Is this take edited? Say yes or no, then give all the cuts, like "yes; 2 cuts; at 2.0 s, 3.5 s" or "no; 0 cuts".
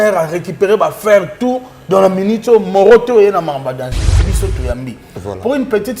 yes; 1 cut; at 4.3 s